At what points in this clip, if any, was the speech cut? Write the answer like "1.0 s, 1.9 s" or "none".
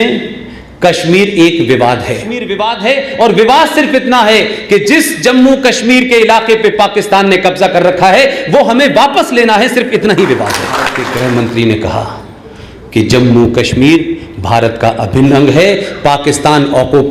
2.5 s, 11.0 s